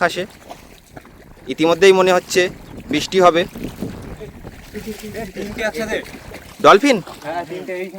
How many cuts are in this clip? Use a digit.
0